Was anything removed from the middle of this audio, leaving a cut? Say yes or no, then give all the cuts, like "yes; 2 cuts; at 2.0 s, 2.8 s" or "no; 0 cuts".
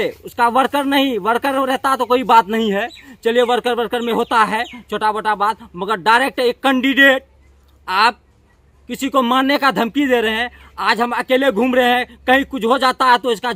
no; 0 cuts